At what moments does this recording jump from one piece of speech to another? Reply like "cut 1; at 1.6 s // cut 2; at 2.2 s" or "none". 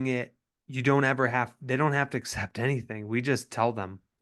none